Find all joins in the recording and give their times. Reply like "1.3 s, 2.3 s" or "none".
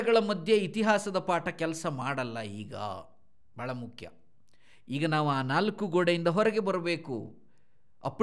none